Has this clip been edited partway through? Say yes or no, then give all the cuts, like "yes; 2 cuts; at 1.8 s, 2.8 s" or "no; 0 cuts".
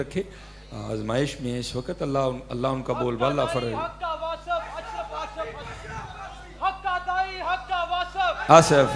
no; 0 cuts